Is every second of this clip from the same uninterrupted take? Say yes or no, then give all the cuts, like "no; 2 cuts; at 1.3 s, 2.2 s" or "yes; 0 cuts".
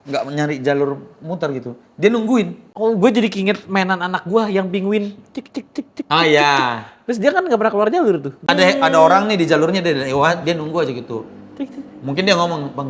no; 2 cuts; at 2.6 s, 8.5 s